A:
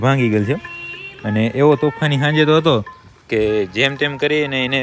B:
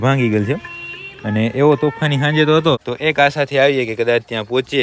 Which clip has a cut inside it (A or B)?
B